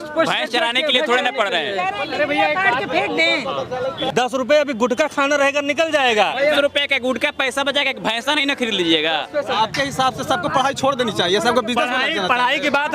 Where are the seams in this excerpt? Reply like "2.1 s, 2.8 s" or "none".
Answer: 4.0 s, 6.5 s, 9.5 s